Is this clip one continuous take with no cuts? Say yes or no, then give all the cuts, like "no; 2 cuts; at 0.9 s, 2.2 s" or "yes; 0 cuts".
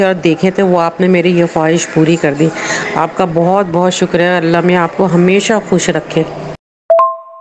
yes; 0 cuts